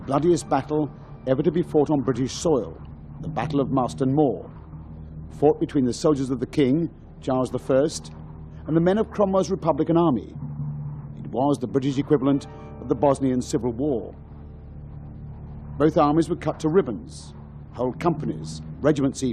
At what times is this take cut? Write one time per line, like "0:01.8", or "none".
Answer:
0:05.7